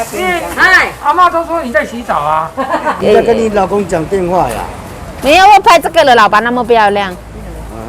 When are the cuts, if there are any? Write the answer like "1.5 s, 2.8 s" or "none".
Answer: 3.0 s